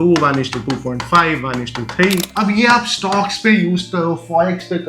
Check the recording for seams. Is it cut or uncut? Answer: cut